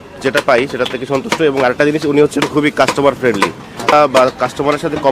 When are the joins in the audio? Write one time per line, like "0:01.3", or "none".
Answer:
0:03.9